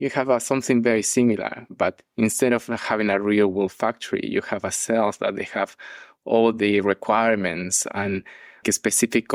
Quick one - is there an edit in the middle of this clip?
no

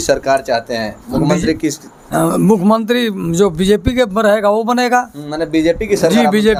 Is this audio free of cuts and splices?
yes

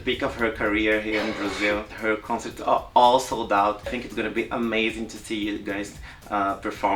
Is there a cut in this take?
yes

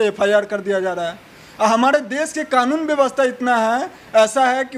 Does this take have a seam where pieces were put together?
no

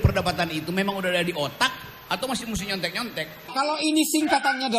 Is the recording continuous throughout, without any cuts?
no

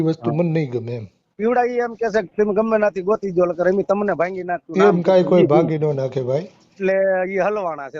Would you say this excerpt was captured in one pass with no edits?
no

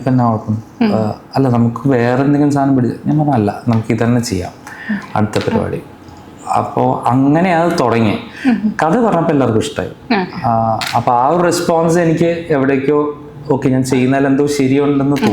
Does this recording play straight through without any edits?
yes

